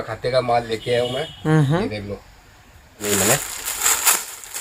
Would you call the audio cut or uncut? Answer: cut